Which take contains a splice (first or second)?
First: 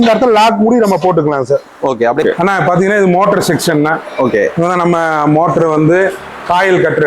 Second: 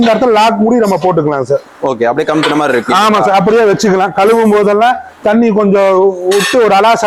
first